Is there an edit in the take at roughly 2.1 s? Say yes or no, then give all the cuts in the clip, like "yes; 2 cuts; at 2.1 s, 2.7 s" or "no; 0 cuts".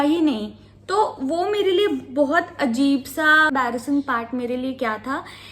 no; 1 cut; at 3.5 s